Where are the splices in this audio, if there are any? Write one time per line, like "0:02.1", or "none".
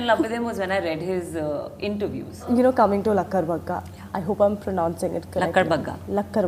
0:02.5